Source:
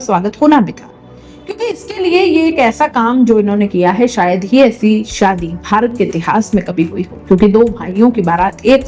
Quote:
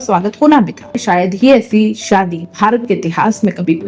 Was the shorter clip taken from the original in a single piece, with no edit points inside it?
no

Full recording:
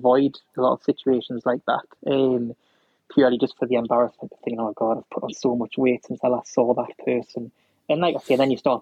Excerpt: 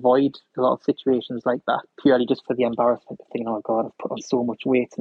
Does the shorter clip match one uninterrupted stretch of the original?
no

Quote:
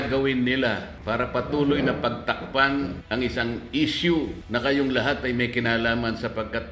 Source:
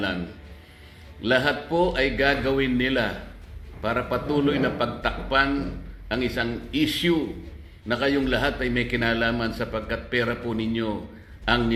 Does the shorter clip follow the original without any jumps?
no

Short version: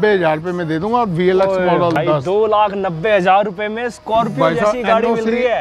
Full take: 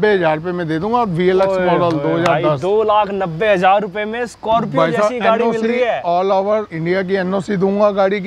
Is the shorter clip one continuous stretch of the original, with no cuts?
no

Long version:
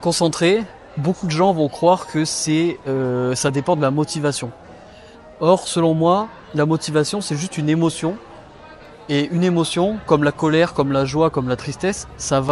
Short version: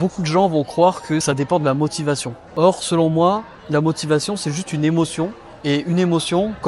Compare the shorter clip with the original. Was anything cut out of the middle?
yes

